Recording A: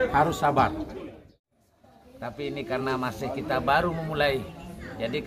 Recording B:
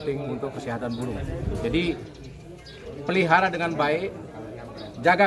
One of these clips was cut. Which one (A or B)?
A